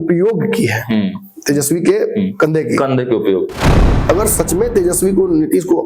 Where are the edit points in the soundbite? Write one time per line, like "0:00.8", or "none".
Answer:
0:03.9

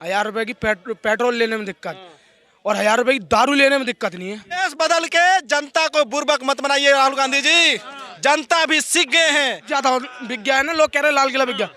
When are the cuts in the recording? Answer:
0:04.6
0:09.6

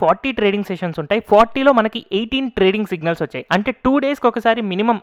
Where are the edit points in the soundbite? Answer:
none

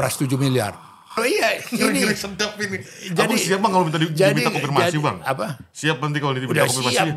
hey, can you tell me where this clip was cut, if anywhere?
0:01.2

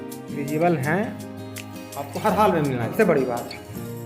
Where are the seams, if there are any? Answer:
0:02.9

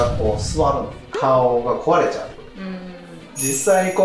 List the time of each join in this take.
0:01.0

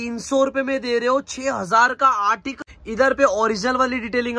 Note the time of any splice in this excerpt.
0:02.6

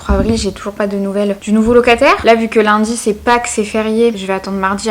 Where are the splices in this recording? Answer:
none

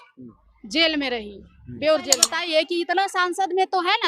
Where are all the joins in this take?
0:02.3

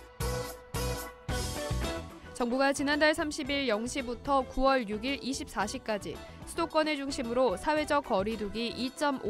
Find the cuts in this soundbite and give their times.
0:01.9

